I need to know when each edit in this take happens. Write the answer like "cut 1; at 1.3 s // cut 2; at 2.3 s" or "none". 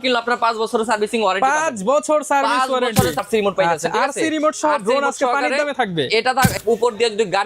cut 1; at 3.2 s // cut 2; at 6.6 s